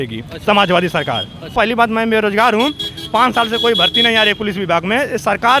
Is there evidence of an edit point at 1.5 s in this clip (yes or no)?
yes